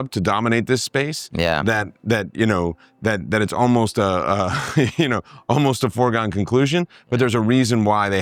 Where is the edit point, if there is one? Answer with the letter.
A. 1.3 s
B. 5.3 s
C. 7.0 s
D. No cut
D